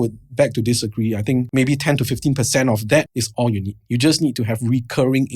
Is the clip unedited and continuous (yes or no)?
no